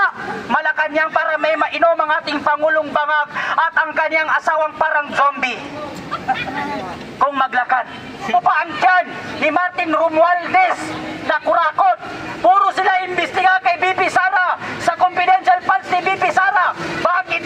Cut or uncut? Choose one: cut